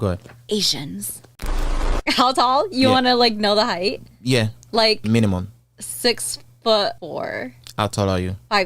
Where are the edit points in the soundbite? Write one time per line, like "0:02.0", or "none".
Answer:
0:01.5